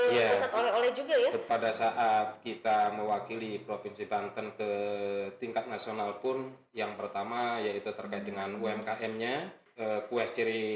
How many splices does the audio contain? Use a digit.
2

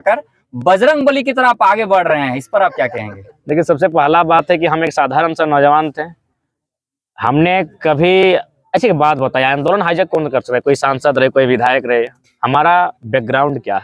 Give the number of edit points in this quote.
0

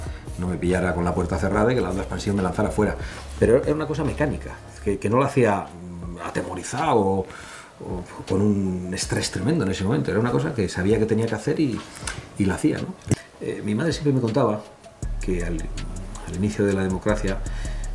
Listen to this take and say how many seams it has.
1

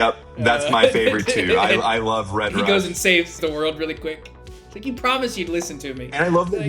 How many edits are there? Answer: 1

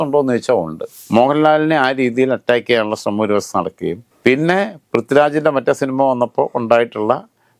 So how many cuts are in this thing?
0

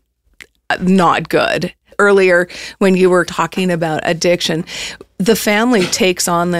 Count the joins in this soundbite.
2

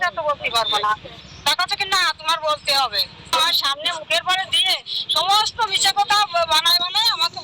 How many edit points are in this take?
1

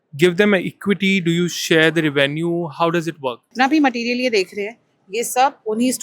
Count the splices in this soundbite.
1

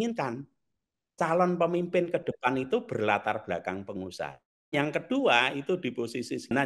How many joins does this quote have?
1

